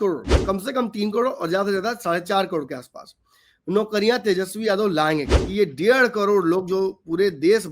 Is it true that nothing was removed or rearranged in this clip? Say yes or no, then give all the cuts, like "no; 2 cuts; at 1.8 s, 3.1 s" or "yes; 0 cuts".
no; 1 cut; at 5.4 s